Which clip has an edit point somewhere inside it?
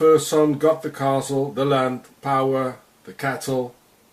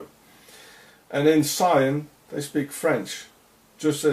second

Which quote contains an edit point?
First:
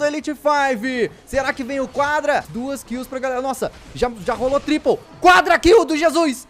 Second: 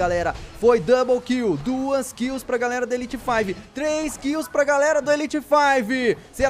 first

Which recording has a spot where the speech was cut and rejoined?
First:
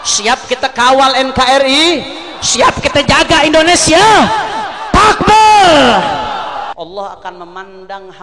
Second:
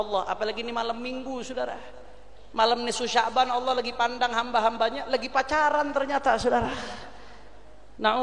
first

